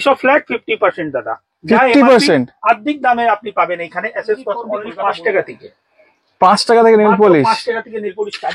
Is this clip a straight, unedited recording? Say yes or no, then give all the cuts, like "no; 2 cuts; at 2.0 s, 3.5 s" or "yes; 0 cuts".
no; 1 cut; at 4.8 s